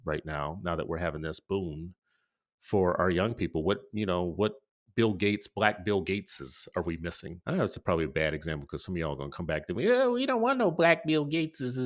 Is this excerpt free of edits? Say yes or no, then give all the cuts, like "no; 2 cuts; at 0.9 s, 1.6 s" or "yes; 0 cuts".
no; 1 cut; at 7.3 s